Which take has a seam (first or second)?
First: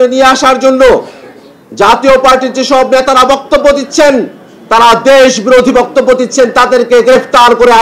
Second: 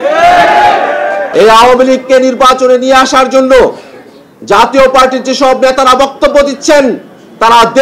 second